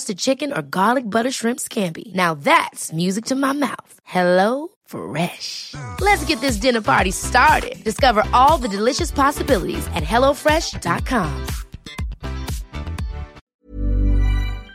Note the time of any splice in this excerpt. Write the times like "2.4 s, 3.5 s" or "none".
13.5 s